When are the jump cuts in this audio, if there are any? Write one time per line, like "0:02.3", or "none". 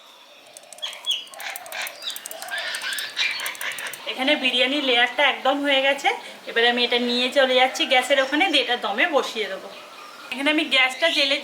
none